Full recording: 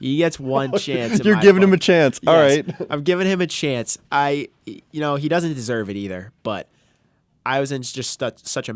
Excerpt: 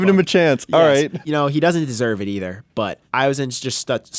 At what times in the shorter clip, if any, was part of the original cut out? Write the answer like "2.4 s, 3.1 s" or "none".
1.2 s, 3.0 s

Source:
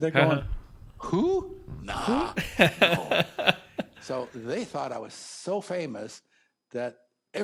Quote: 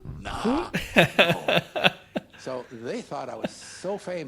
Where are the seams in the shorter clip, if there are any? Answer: none

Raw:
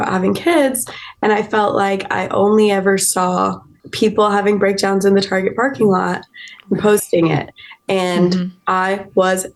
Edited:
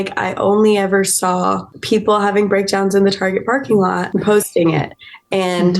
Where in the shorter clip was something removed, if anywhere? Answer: 1.7 s, 4.0 s

